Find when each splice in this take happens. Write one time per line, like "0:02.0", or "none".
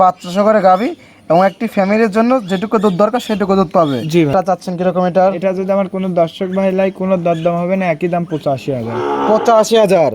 0:04.3

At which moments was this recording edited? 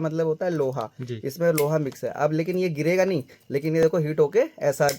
none

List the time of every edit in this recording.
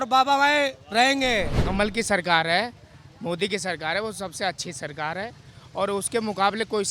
0:01.6

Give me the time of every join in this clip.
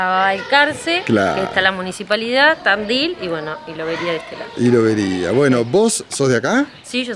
none

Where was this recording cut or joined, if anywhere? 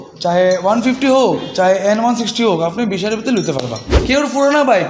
0:03.9

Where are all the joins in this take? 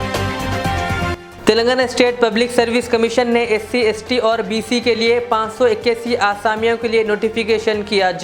0:01.1

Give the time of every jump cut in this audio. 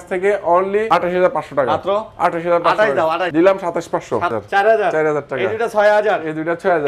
0:00.9
0:03.3
0:04.3

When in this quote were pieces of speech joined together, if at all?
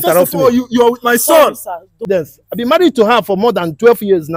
0:02.0

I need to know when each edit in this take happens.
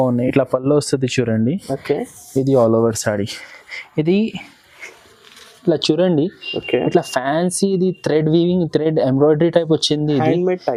none

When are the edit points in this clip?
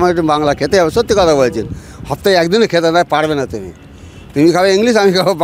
none

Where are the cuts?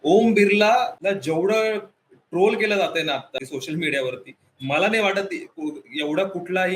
0:01.0

